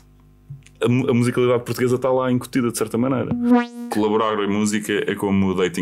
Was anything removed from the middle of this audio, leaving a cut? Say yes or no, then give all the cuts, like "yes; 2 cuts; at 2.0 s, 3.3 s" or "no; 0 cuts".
yes; 1 cut; at 3.5 s